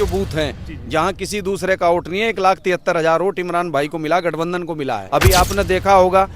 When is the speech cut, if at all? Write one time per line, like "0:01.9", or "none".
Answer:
0:05.0